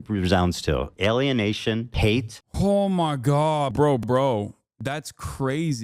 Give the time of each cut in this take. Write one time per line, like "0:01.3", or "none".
0:02.3
0:03.7
0:04.7